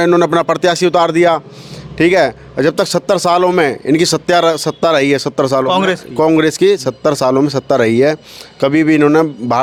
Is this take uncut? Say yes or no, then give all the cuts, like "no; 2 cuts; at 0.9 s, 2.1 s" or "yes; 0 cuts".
yes; 0 cuts